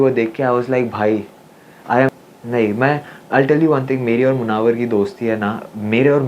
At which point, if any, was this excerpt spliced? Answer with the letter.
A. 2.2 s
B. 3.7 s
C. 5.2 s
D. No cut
A